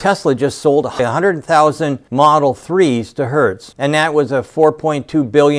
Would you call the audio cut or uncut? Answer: cut